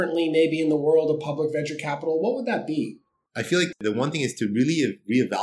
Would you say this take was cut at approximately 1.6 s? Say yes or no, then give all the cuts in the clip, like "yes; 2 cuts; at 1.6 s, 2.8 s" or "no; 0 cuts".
no; 1 cut; at 3.3 s